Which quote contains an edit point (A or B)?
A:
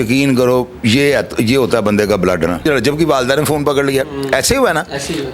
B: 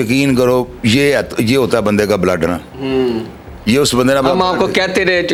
A